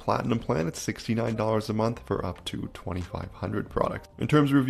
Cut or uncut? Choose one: uncut